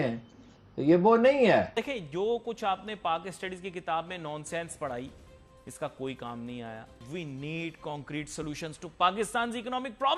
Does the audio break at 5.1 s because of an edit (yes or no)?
no